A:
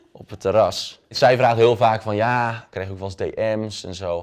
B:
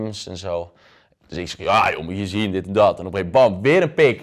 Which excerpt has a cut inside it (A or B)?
A